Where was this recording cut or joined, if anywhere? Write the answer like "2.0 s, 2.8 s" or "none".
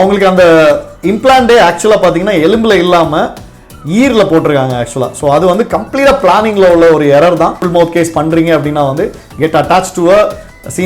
7.6 s